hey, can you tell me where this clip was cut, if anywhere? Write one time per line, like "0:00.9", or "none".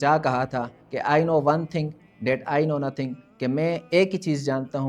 none